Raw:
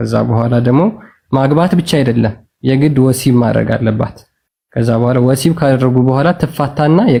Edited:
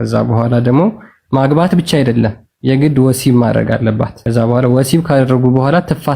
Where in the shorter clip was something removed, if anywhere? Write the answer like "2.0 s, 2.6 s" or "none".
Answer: 4.1 s